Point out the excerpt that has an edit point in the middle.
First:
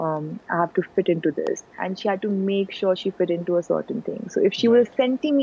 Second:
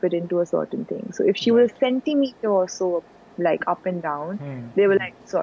first; 1 cut; at 1.8 s

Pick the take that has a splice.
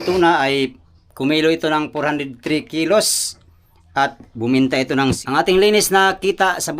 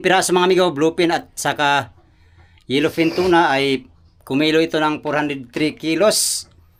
first; 1 cut; at 5.2 s

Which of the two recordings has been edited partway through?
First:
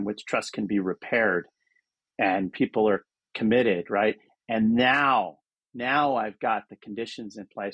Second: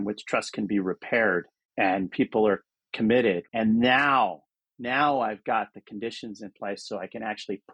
second; 2 cuts; at 1.6 s, 3.4 s

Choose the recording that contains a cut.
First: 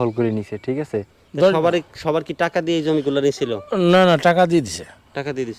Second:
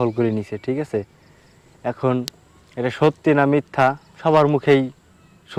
first; 1 cut; at 1.2 s

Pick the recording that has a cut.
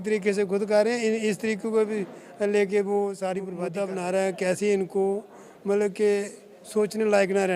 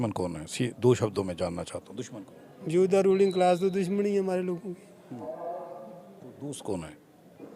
first; 1 cut; at 3.6 s

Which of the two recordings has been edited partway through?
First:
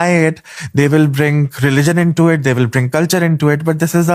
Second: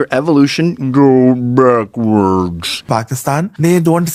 second; 1 cut; at 2.8 s

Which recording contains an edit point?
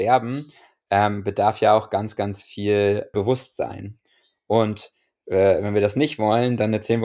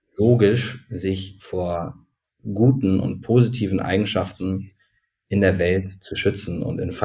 first; 1 cut; at 3.1 s

